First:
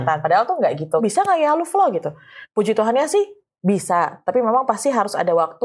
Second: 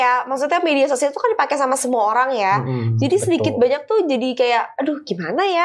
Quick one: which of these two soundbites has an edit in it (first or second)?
first